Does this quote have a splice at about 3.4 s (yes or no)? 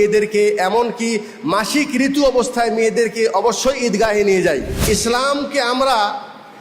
no